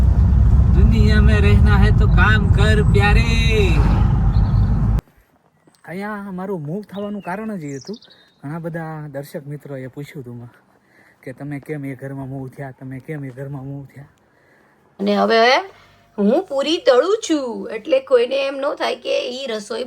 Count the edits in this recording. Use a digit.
2